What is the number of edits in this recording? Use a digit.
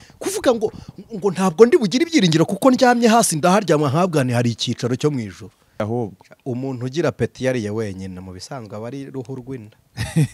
1